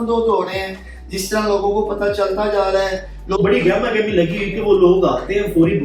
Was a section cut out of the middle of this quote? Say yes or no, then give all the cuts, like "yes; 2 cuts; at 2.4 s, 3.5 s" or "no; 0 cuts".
yes; 1 cut; at 3.4 s